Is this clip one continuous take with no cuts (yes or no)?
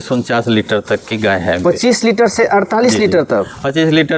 yes